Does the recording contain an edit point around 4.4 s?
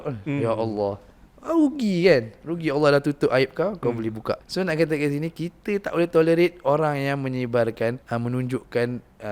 yes; 2 cuts; at 4.4 s, 8.0 s

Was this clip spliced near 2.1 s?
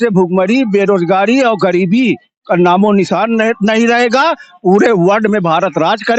no; 0 cuts

